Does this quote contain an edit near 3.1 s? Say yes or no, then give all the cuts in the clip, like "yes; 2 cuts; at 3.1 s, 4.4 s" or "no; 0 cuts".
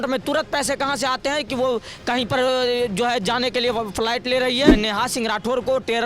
no; 1 cut; at 4.7 s